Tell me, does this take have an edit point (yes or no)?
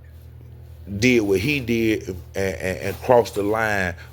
no